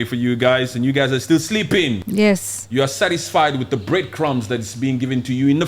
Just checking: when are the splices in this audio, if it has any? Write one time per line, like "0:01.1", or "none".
0:02.0